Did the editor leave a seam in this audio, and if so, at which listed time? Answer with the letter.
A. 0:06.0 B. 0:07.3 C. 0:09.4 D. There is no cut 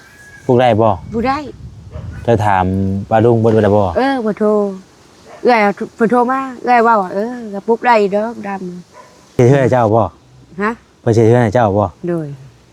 C